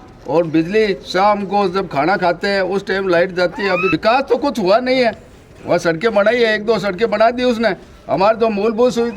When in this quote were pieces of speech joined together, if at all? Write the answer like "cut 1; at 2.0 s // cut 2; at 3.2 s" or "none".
cut 1; at 3.9 s